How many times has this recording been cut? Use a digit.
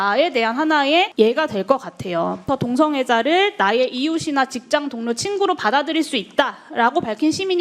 2